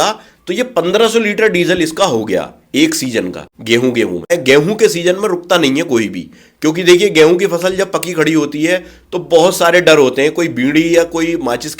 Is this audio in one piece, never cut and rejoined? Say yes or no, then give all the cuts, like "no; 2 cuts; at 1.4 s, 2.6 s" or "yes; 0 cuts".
no; 1 cut; at 4.3 s